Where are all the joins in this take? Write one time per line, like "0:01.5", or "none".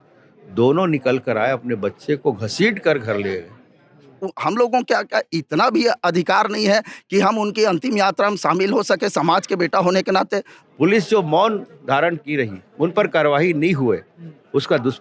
0:04.3
0:10.5